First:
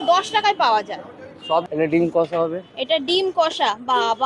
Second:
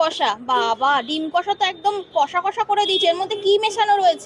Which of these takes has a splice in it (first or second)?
first